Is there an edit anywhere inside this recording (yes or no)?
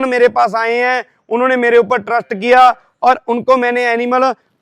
no